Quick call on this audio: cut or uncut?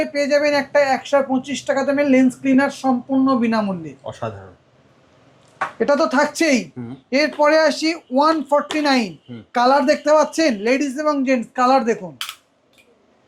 uncut